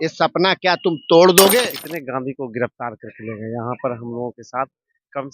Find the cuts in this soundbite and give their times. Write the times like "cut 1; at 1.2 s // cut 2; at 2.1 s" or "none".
cut 1; at 1.6 s